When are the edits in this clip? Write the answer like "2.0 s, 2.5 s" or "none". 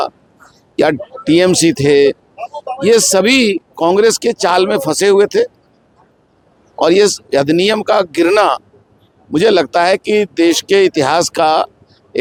none